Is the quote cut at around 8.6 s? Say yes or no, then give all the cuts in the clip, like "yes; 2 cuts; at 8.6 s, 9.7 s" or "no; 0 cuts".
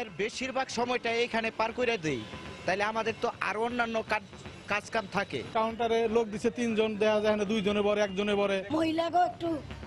yes; 1 cut; at 8.6 s